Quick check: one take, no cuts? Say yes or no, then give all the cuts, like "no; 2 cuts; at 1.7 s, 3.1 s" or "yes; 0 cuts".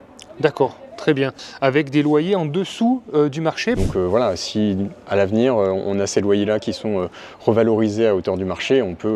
no; 2 cuts; at 1.4 s, 3.8 s